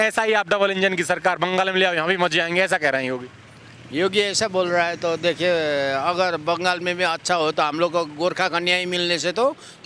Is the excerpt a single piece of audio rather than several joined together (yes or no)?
yes